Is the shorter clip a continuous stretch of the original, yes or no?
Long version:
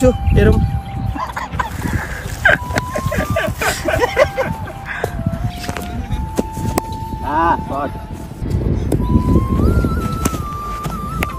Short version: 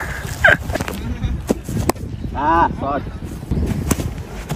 no